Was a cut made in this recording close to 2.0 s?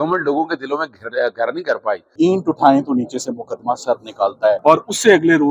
yes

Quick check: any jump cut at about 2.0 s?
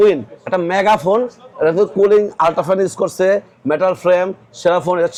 no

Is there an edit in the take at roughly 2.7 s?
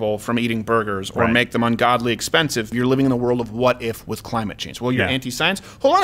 yes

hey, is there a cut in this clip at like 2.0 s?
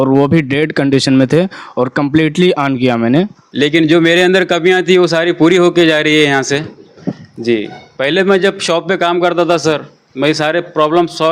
no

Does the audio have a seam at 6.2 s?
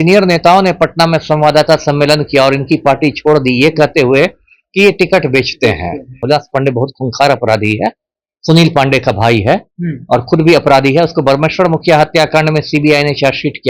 yes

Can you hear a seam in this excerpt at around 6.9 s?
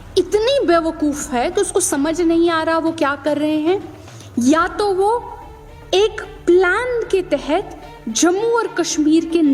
no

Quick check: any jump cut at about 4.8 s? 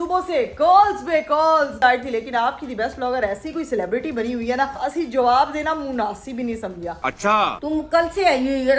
yes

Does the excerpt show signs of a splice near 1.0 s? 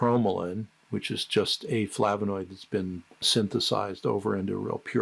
no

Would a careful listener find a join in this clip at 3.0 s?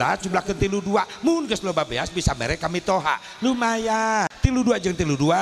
no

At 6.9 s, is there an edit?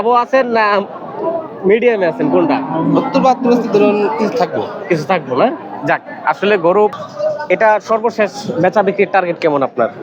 yes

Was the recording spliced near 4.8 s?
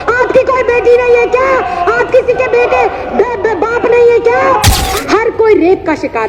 yes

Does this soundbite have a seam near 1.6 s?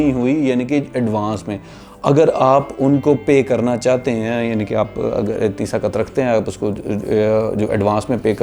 no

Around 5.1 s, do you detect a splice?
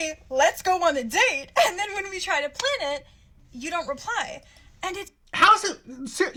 no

